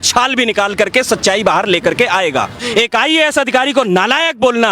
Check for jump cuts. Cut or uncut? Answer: cut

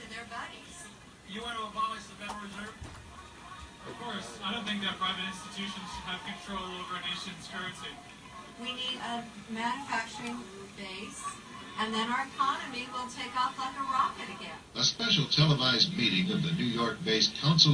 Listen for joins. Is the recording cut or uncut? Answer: uncut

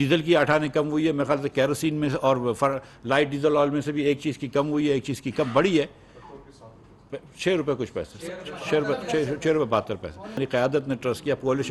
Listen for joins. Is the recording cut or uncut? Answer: cut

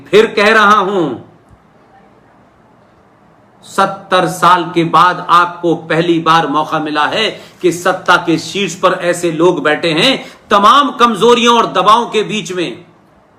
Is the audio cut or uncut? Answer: uncut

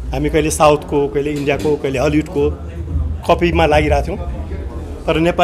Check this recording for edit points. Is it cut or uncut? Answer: uncut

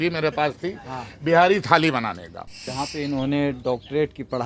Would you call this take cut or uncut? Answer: cut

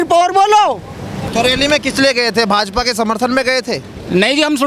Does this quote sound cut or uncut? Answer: cut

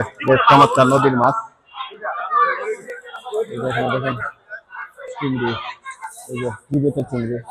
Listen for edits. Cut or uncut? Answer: uncut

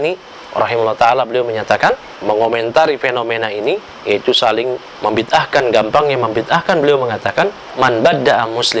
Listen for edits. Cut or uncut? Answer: cut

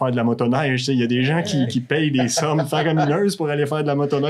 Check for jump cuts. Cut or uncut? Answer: uncut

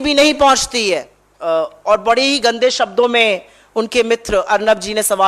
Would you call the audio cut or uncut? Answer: cut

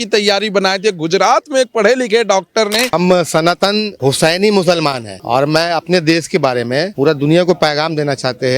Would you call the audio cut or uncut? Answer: cut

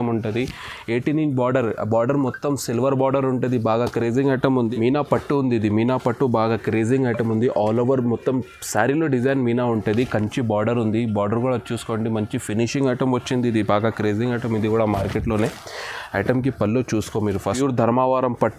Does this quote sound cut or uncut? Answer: cut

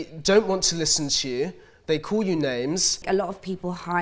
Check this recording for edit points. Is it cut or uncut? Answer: cut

